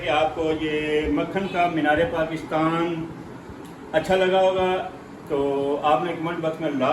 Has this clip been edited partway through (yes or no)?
no